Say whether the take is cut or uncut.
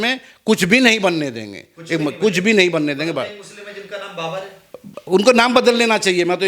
uncut